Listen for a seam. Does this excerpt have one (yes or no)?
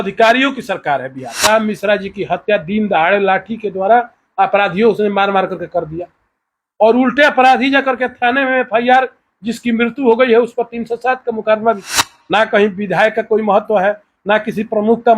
yes